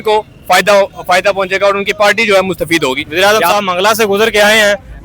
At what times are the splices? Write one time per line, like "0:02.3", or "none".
0:03.0